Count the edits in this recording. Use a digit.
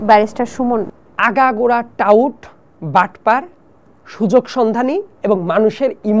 1